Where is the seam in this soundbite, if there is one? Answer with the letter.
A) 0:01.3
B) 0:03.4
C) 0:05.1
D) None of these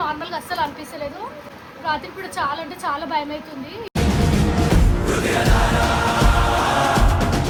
D